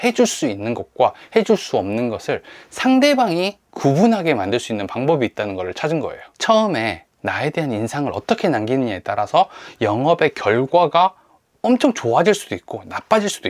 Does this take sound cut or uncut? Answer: cut